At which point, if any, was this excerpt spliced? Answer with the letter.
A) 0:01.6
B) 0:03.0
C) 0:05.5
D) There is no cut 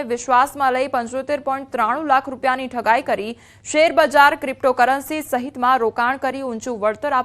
C